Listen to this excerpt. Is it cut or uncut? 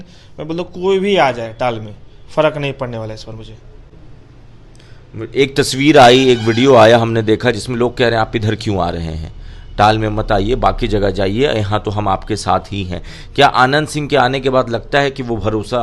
uncut